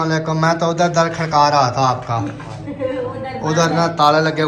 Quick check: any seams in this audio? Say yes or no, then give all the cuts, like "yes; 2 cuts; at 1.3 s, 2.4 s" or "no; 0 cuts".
no; 0 cuts